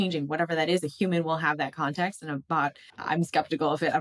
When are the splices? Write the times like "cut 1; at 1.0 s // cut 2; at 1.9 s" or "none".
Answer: cut 1; at 2.9 s